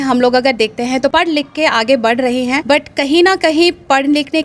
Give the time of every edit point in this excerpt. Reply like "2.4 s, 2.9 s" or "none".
1.1 s, 2.6 s